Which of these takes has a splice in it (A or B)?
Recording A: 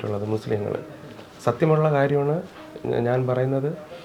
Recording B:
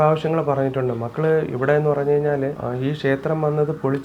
B